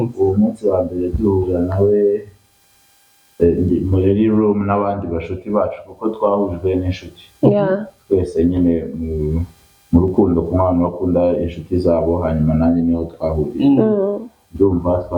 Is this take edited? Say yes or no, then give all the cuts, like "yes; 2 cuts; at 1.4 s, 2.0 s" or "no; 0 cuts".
no; 0 cuts